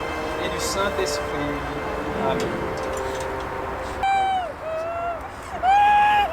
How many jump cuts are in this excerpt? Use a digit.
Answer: 1